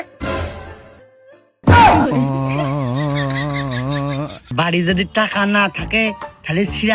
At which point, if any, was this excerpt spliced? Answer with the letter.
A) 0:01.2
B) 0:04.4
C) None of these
B